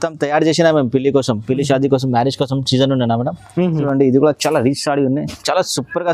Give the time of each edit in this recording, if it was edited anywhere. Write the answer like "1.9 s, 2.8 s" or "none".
3.8 s

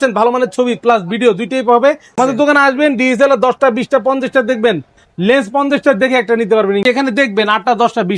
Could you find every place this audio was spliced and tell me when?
2.1 s, 6.8 s

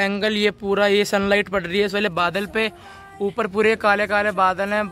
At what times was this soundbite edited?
none

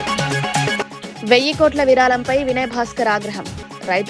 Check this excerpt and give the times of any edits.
1.0 s

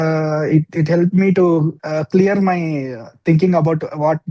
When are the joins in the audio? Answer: 1.8 s

